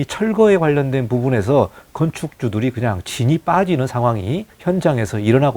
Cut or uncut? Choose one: cut